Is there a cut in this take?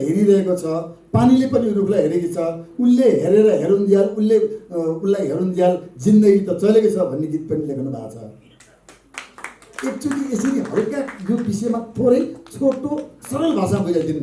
no; 0 cuts

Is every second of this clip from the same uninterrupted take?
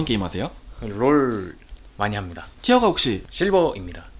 no; 1 cut; at 3.3 s

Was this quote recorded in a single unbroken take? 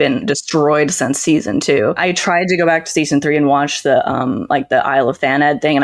no; 1 cut; at 2.1 s

